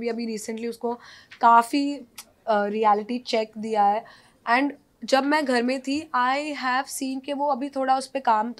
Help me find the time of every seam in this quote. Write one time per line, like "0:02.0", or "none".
none